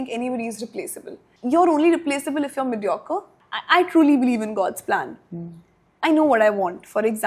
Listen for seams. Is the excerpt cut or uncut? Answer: cut